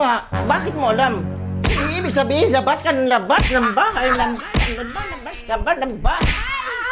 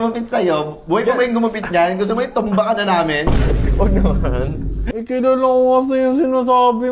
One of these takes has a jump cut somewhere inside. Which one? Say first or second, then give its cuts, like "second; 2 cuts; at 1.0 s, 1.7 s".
second; 1 cut; at 4.8 s